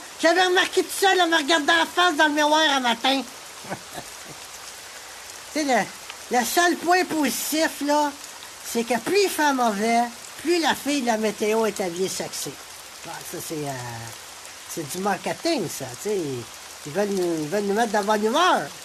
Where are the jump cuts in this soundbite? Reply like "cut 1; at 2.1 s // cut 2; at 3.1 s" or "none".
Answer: none